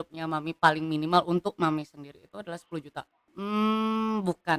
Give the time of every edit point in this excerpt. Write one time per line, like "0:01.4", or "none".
0:03.2